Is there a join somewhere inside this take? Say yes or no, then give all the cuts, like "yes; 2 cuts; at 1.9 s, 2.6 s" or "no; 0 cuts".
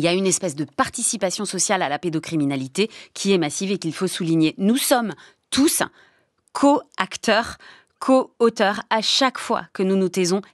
no; 0 cuts